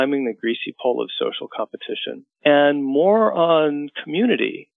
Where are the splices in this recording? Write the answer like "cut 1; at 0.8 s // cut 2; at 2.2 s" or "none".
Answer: cut 1; at 2.3 s